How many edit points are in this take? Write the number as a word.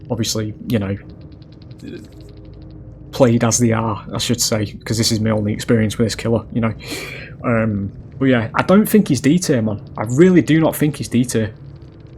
one